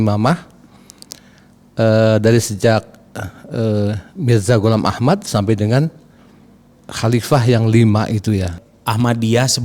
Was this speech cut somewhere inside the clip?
yes; 1 cut; at 8.5 s

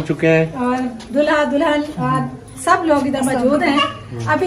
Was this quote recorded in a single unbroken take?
yes; 0 cuts

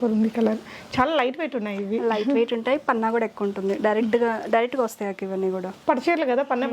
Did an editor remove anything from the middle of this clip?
no; 0 cuts

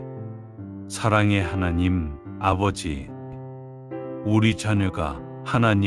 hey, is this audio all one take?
no; 1 cut; at 0.9 s

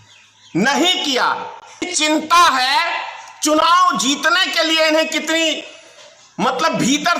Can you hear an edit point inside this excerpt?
yes; 1 cut; at 1.9 s

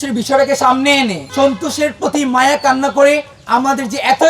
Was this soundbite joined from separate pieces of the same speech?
yes; 2 cuts; at 1.2 s, 3.3 s

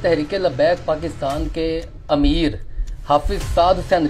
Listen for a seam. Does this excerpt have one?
yes; 1 cut; at 1.9 s

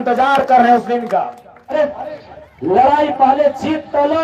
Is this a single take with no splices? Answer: no; 1 cut; at 1.7 s

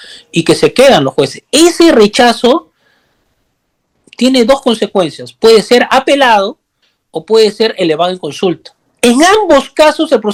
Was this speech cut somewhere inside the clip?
no; 0 cuts

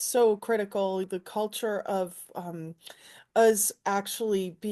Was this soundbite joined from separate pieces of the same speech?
yes; 1 cut; at 1.1 s

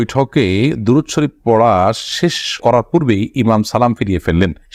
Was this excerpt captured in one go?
yes; 0 cuts

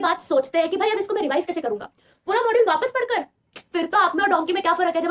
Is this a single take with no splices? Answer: yes; 0 cuts

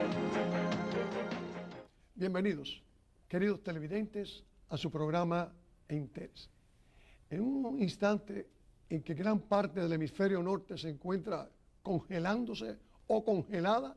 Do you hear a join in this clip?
no; 0 cuts

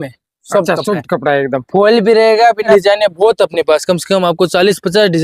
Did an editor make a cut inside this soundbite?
yes; 1 cut; at 2.7 s

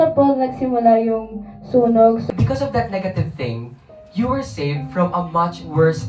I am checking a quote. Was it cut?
yes; 1 cut; at 2.2 s

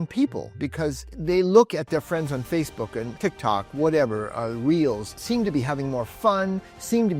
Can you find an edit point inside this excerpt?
yes; 3 cuts; at 1.1 s, 3.1 s, 5.2 s

